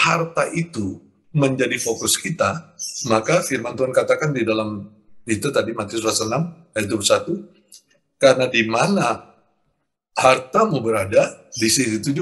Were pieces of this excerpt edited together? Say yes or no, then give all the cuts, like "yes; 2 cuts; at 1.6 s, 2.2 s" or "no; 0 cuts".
no; 0 cuts